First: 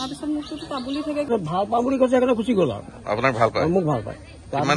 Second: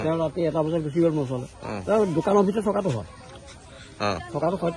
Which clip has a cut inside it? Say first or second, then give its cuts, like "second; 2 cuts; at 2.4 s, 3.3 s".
first; 1 cut; at 1.3 s